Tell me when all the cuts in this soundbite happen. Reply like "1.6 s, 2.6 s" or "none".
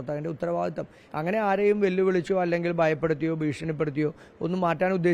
1.0 s